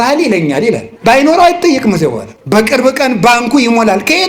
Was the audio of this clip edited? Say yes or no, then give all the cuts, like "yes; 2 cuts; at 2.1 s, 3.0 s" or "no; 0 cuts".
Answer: yes; 2 cuts; at 0.9 s, 2.3 s